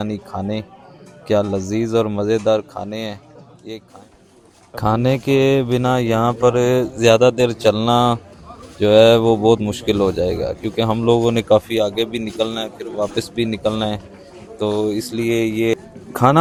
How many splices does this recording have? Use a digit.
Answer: 0